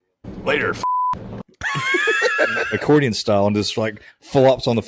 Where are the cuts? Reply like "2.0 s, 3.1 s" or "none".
2.7 s